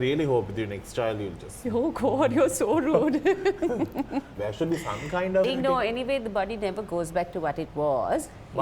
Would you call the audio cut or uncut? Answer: cut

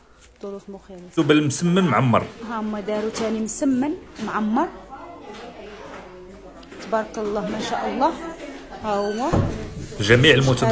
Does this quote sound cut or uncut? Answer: cut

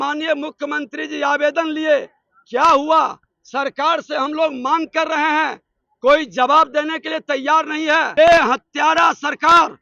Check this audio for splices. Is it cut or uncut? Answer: cut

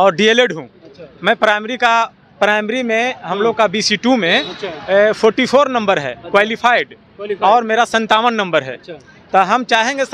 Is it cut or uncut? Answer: uncut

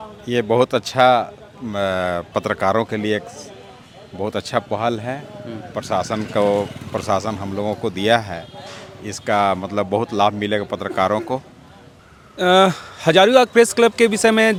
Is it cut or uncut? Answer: uncut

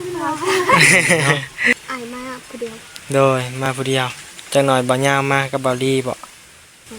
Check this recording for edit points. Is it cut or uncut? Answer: cut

